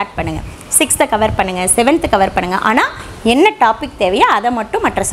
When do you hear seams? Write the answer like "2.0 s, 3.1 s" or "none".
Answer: none